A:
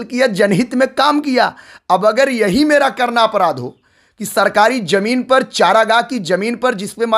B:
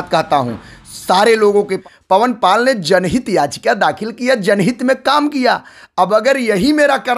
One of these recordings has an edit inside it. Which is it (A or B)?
B